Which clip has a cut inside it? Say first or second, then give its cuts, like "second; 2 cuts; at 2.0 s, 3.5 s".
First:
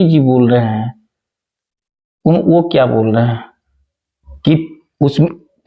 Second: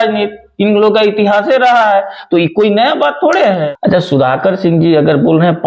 second; 1 cut; at 3.6 s